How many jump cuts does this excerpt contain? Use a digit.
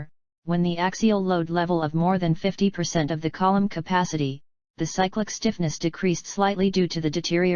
1